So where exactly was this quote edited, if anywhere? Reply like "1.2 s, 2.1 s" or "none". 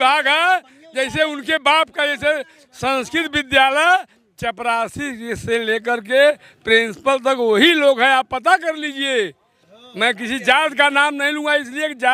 none